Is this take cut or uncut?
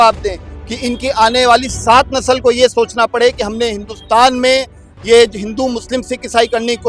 uncut